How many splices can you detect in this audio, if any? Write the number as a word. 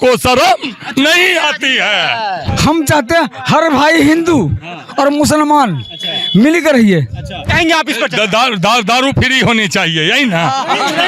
two